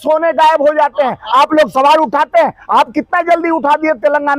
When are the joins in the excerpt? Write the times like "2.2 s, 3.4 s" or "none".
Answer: none